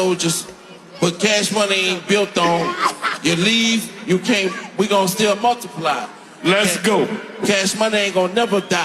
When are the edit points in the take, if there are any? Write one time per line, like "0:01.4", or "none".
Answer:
0:07.2